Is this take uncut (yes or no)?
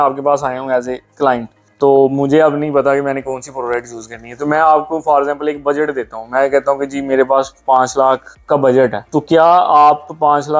no